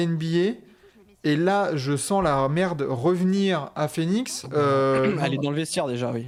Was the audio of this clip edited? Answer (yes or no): no